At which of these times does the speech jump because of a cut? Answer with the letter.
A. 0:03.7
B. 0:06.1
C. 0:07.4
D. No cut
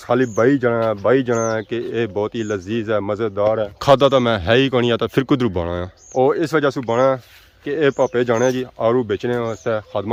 D